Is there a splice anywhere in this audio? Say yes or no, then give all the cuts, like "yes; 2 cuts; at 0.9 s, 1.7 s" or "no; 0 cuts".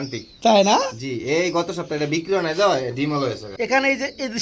yes; 1 cut; at 3.5 s